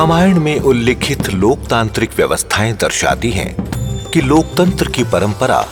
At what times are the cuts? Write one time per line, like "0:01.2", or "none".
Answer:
none